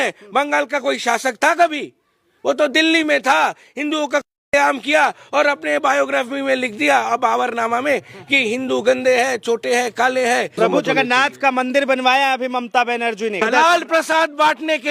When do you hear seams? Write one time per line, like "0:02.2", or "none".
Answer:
0:10.6
0:13.4